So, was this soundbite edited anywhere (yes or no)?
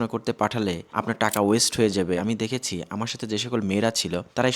yes